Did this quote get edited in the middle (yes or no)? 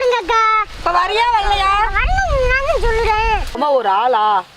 yes